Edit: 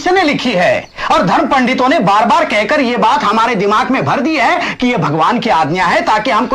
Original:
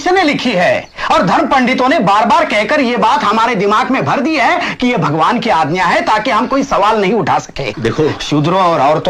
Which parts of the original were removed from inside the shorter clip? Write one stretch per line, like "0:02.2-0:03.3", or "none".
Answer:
none